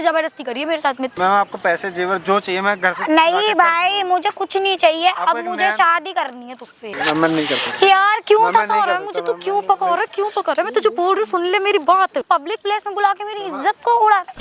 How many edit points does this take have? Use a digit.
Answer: 3